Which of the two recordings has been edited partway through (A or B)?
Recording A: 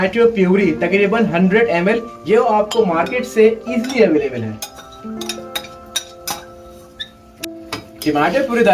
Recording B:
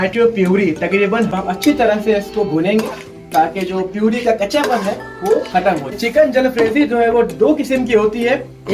B